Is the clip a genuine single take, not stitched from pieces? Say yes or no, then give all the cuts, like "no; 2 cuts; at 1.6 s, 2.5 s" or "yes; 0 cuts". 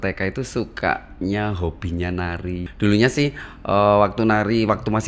no; 1 cut; at 2.7 s